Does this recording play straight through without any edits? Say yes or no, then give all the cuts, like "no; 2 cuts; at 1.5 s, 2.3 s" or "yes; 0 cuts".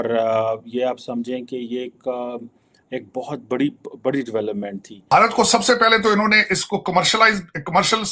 no; 1 cut; at 5.1 s